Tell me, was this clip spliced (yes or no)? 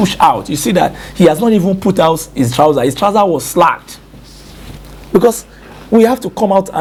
no